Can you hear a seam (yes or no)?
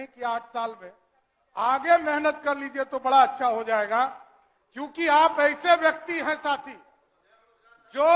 no